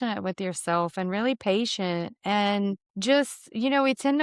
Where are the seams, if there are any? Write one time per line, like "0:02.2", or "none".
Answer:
0:02.9

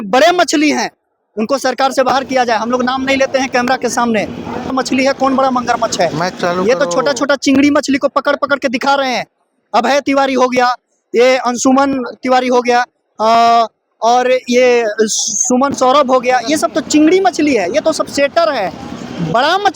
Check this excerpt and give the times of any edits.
0:04.7

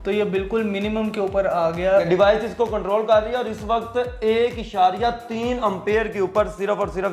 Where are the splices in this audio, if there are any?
0:02.1

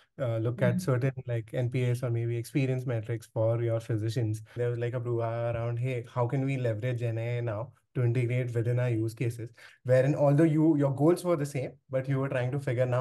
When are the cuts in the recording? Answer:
0:04.5
0:09.7

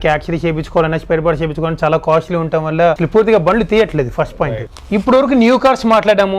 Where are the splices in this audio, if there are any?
0:03.0
0:04.6

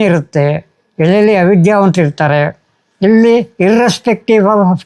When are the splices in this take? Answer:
none

